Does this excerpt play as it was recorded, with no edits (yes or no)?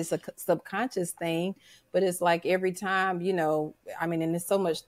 yes